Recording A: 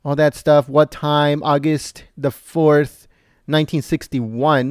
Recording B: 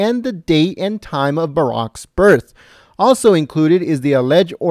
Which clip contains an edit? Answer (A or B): B